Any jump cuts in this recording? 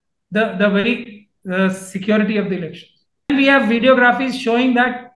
yes; 1 cut; at 3.3 s

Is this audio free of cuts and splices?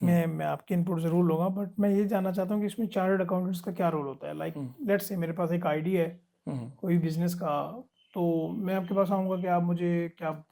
yes; 0 cuts

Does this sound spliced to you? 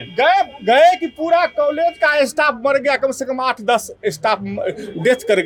no; 0 cuts

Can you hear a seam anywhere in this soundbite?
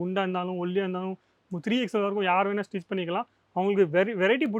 no; 0 cuts

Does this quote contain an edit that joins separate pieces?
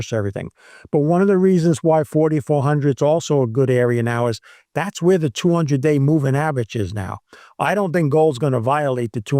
no; 0 cuts

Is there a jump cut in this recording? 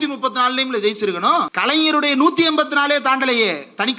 yes; 1 cut; at 1.5 s

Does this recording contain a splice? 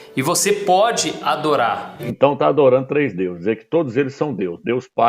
yes; 1 cut; at 2.0 s

